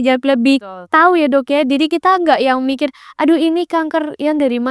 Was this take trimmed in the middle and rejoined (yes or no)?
no